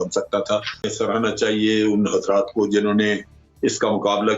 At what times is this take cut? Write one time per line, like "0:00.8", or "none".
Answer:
0:00.9